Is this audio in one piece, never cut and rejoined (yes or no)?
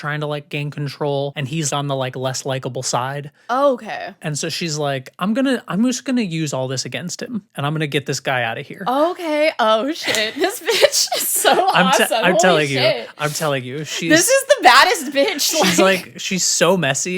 no